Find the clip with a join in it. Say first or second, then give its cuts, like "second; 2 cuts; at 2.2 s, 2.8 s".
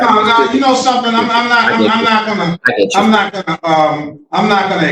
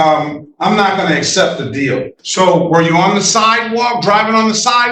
second; 1 cut; at 2.2 s